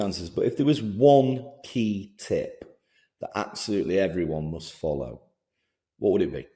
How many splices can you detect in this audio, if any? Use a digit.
0